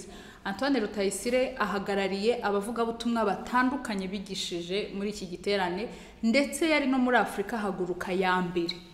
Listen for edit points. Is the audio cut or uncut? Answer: uncut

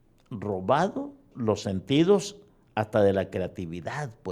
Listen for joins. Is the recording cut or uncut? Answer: cut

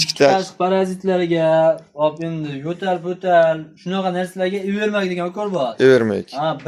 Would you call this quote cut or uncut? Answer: uncut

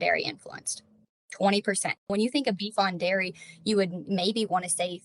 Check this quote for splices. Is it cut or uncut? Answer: cut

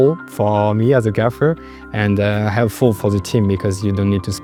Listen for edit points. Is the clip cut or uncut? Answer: uncut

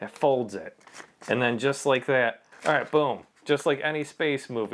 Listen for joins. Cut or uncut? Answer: cut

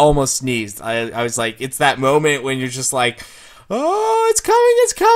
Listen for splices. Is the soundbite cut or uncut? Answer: uncut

